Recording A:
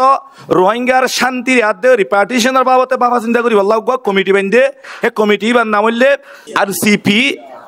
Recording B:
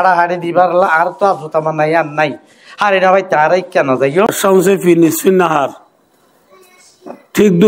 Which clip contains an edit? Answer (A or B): B